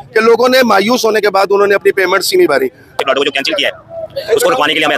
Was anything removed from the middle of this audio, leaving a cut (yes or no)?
yes